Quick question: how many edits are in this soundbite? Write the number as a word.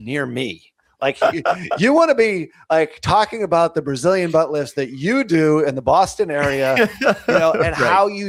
zero